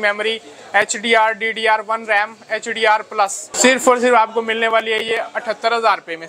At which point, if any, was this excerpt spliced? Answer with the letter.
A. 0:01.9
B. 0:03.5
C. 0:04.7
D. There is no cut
B